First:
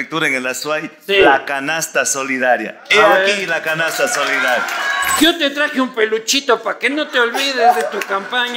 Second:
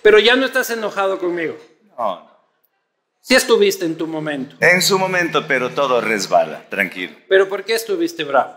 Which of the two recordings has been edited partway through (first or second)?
first